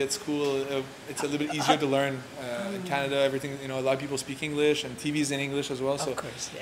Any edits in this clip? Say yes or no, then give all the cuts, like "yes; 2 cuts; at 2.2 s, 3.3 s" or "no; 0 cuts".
no; 0 cuts